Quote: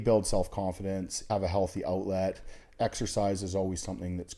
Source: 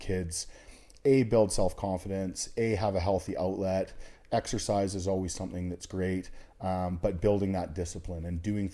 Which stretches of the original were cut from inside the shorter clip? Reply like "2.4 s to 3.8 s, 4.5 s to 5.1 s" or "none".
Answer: 2.5 s to 2.8 s